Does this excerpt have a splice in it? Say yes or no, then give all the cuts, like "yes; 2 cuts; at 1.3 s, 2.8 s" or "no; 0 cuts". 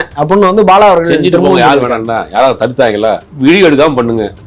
yes; 1 cut; at 3.3 s